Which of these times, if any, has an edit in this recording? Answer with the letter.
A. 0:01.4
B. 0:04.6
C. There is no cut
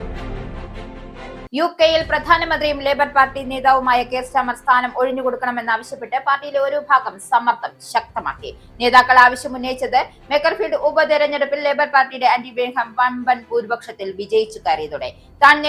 A